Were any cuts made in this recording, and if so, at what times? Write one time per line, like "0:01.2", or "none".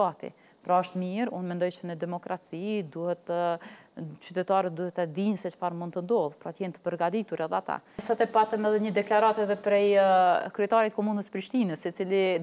0:08.0